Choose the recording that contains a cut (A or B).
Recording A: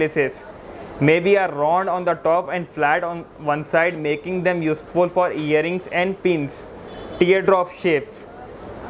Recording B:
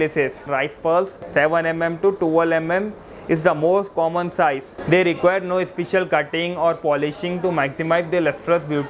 B